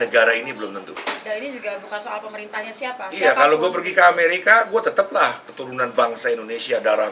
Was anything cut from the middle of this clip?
yes; 1 cut; at 0.9 s

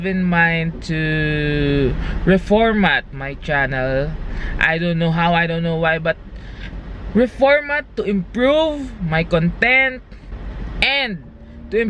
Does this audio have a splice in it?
yes; 1 cut; at 7.7 s

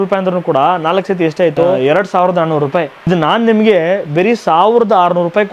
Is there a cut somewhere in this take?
yes; 2 cuts; at 1.8 s, 3.1 s

